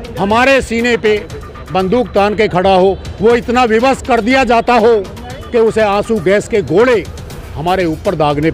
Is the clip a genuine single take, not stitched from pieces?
yes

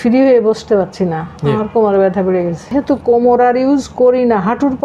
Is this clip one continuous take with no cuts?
no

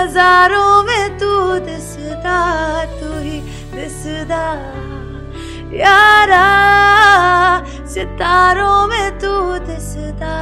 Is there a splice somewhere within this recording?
no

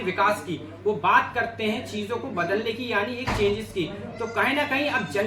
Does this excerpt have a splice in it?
no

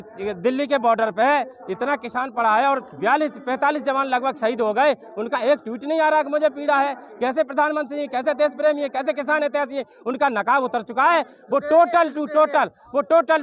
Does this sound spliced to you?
no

